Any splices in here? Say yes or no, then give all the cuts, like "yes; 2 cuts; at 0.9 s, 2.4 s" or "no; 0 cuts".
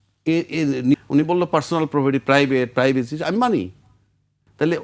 yes; 1 cut; at 0.9 s